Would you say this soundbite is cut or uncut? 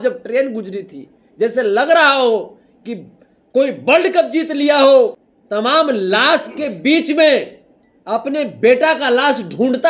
cut